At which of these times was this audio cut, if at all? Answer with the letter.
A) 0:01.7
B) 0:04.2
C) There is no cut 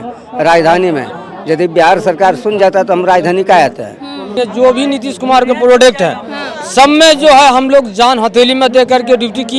B